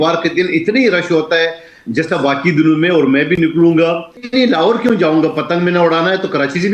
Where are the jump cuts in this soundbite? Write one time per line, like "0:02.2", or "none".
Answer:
0:04.2